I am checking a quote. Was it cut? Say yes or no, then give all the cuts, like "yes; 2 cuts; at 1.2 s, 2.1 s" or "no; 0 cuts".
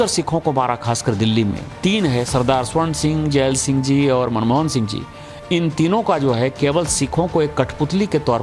yes; 1 cut; at 1.7 s